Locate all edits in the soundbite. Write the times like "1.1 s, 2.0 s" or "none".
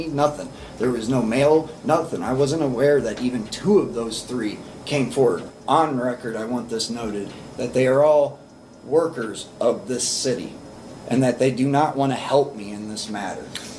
5.4 s